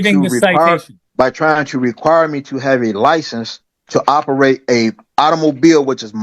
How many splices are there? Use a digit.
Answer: 1